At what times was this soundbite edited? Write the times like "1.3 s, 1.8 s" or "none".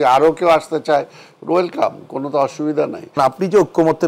3.2 s